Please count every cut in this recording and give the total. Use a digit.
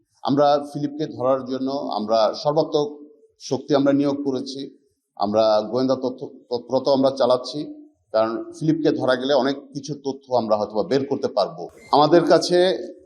1